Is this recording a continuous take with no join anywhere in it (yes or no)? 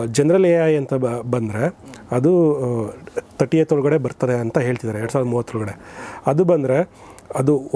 yes